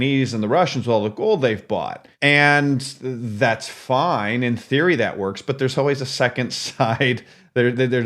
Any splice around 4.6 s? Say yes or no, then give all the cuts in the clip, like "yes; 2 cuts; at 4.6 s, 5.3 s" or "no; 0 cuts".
no; 1 cut; at 2.0 s